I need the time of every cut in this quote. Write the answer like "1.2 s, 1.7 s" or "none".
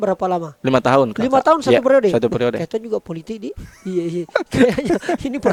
none